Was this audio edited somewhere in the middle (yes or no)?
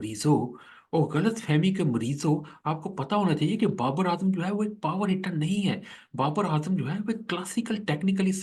no